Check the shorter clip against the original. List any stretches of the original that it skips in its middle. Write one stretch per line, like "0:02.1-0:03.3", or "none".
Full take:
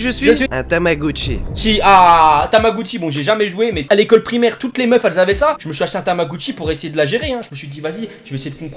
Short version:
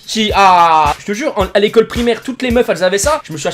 0:02.5-0:03.4